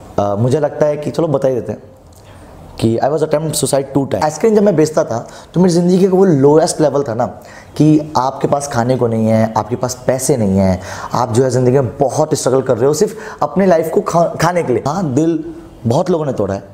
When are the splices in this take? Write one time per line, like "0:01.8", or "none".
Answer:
0:04.2
0:14.9